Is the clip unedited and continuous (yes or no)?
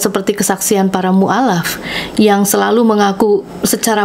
yes